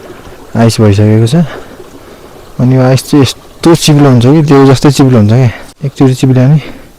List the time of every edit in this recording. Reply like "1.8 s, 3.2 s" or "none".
5.8 s